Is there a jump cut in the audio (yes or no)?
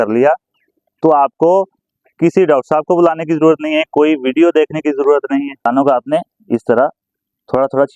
yes